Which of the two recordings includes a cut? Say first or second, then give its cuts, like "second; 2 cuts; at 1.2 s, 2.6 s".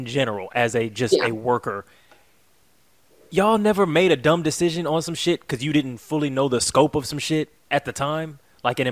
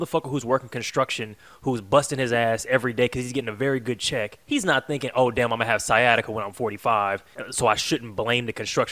second; 2 cuts; at 4.4 s, 7.4 s